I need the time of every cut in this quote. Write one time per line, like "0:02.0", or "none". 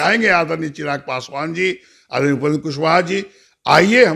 none